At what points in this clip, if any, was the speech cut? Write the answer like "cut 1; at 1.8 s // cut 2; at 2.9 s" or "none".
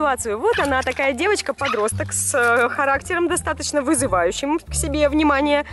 cut 1; at 1.6 s